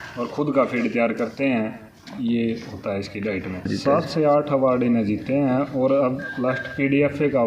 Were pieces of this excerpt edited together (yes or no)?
yes